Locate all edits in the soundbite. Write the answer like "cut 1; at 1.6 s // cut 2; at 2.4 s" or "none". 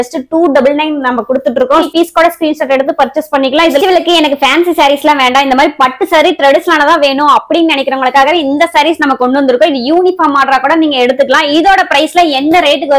none